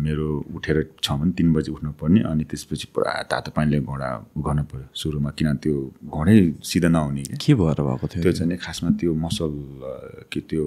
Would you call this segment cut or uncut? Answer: uncut